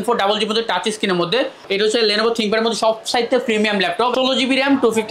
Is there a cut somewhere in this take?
yes; 2 cuts; at 1.6 s, 4.1 s

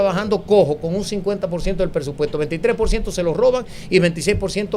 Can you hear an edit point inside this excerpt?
no; 0 cuts

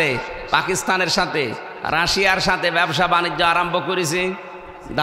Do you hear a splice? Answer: no; 0 cuts

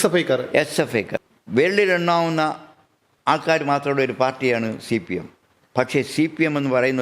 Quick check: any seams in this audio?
yes; 1 cut; at 1.1 s

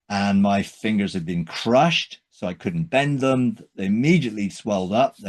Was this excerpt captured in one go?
yes; 0 cuts

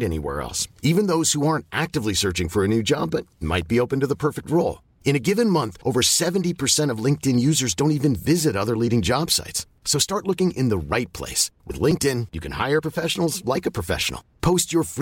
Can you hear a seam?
no; 0 cuts

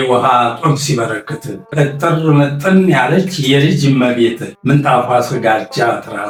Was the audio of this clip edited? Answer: no; 0 cuts

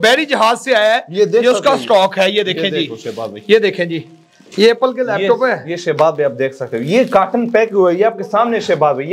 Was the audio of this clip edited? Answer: no; 0 cuts

